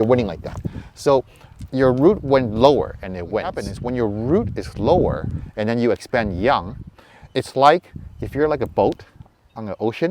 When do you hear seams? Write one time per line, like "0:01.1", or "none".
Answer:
0:03.7